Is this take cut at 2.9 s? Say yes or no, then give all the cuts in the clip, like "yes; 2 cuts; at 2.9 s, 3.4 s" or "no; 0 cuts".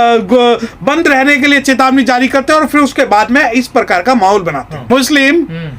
no; 1 cut; at 4.7 s